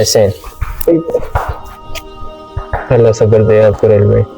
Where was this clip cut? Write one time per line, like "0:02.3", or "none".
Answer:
none